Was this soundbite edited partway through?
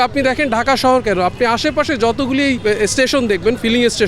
yes; 1 cut; at 2.6 s

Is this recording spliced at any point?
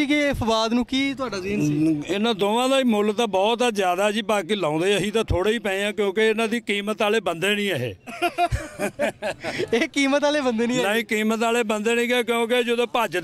no; 0 cuts

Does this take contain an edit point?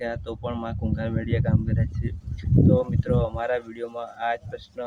no; 0 cuts

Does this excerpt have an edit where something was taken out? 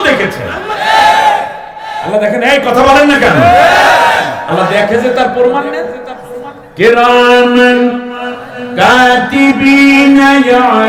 no; 0 cuts

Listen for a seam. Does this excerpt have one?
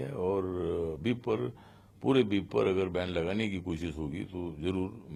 no; 0 cuts

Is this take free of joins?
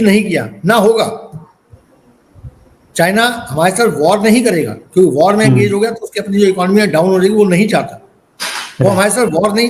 yes; 0 cuts

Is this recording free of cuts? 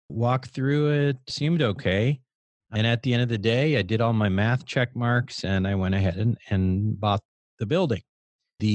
yes; 0 cuts

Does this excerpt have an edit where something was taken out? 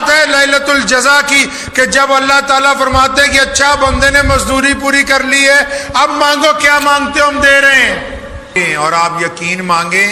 yes; 1 cut; at 8.5 s

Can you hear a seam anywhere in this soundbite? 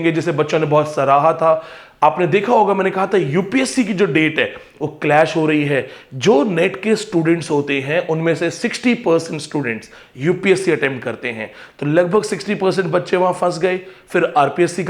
no; 0 cuts

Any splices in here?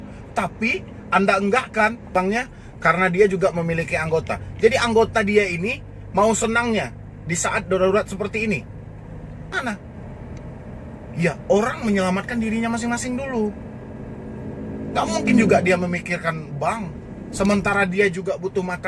yes; 2 cuts; at 2.1 s, 9.5 s

